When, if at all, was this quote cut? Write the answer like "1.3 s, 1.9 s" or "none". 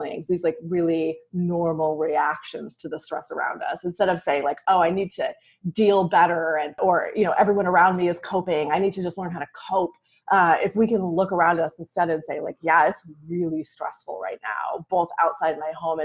6.8 s